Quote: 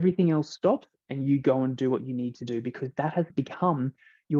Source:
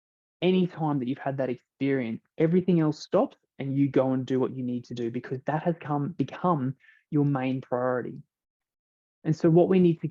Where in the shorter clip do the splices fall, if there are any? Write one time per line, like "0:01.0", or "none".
0:03.3